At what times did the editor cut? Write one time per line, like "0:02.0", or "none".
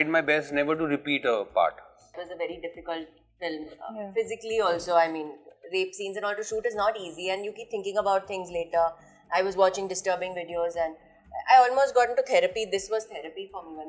0:02.2